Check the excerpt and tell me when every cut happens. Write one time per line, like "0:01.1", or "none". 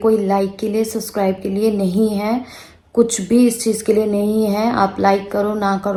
none